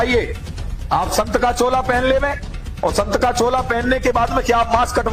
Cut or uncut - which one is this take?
uncut